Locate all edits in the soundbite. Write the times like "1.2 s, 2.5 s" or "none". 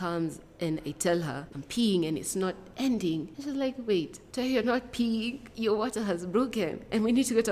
1.6 s, 3.3 s, 4.2 s, 5.4 s